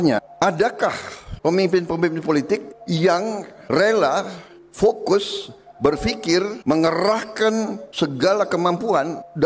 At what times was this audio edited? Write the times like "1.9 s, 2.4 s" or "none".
none